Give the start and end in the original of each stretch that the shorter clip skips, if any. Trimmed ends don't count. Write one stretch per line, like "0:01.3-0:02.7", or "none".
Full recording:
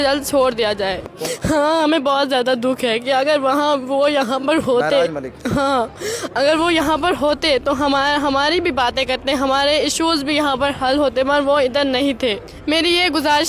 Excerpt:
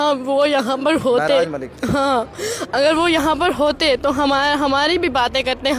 none